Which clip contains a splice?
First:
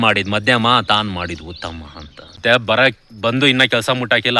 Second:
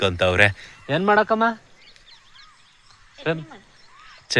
first; 1 cut; at 2.4 s

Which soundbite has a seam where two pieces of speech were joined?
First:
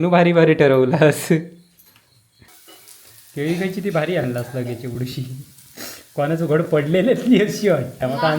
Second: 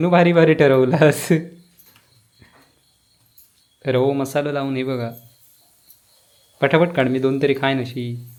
first; 1 cut; at 2.5 s

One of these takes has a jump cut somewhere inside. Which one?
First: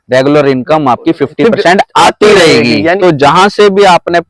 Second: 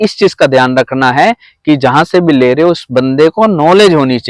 first; 1 cut; at 3.0 s

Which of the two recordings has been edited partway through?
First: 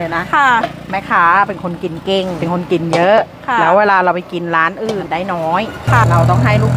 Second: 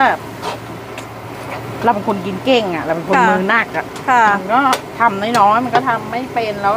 first; 3 cuts; at 2.4 s, 5.0 s, 6.0 s

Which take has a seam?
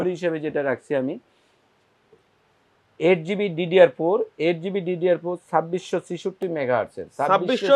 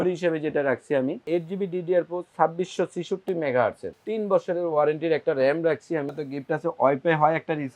second; 3 cuts; at 1.2 s, 3.9 s, 6.2 s

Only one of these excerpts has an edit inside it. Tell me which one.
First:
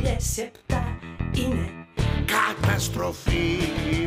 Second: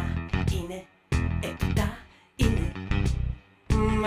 first; 1 cut; at 1.9 s

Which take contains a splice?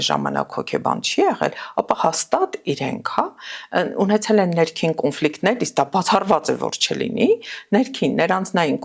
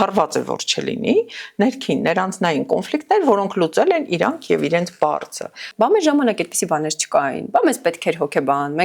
second; 1 cut; at 5.6 s

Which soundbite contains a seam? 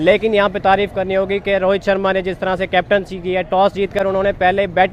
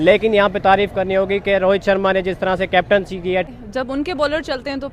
second; 1 cut; at 3.5 s

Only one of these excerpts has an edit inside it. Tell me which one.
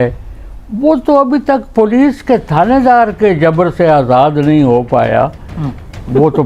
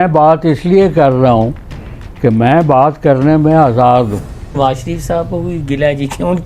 second; 1 cut; at 4.6 s

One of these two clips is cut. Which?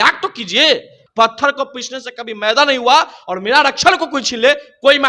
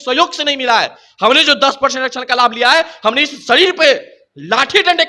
first; 1 cut; at 1.0 s

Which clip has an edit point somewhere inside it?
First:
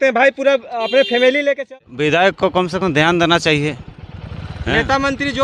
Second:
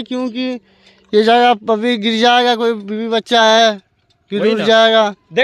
first; 1 cut; at 1.7 s

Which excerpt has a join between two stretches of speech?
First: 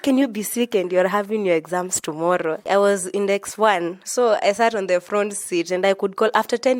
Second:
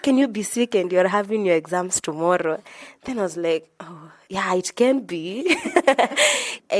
first; 2 cuts; at 2.6 s, 4.0 s

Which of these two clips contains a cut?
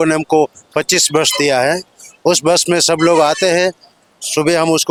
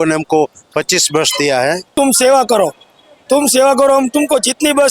second; 1 cut; at 1.9 s

